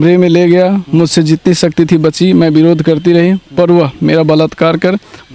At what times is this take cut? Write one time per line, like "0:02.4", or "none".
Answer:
none